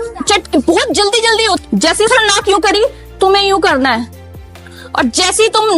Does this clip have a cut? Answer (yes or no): yes